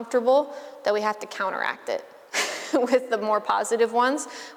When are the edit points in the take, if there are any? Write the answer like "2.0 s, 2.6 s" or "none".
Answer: none

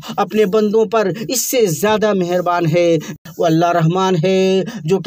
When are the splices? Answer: 3.2 s

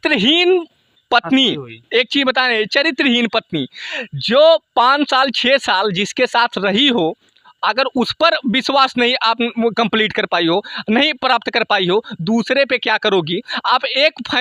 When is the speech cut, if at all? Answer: none

